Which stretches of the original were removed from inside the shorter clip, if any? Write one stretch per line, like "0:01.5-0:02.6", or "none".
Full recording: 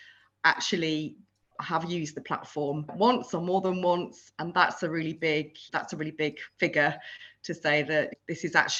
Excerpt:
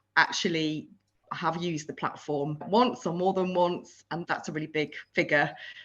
0:04.4-0:05.6